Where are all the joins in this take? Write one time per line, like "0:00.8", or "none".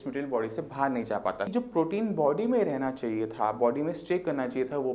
0:01.5